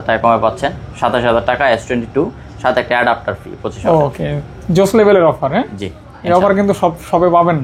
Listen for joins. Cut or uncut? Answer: uncut